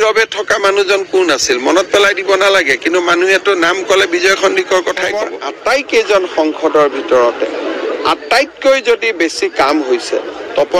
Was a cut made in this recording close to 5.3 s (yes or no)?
yes